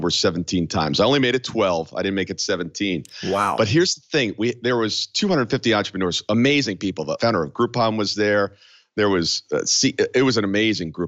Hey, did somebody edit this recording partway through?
no; 0 cuts

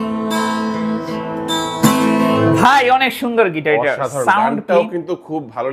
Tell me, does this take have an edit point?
no; 0 cuts

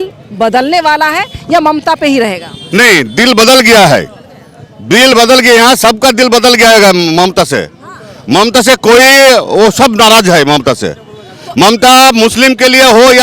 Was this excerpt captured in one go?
yes; 0 cuts

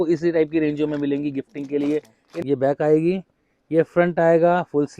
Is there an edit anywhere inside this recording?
yes; 1 cut; at 2.2 s

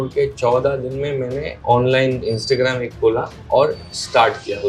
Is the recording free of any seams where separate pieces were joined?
yes; 0 cuts

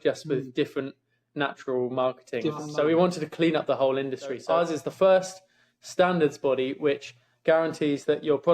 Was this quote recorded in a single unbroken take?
no; 2 cuts; at 2.6 s, 4.4 s

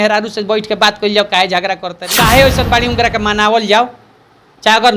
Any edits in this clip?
yes; 1 cut; at 2.0 s

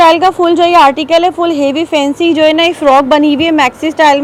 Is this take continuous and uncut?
yes; 0 cuts

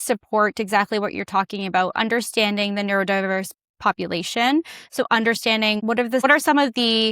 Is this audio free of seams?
no; 1 cut; at 6.2 s

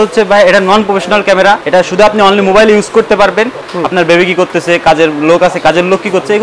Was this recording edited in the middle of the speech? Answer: yes; 2 cuts; at 1.6 s, 3.7 s

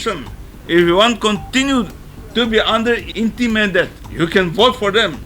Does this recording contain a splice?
yes; 2 cuts; at 3.1 s, 4.0 s

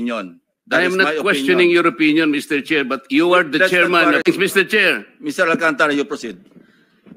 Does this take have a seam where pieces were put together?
yes; 1 cut; at 4.2 s

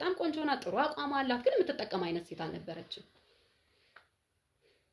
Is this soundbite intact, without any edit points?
yes; 0 cuts

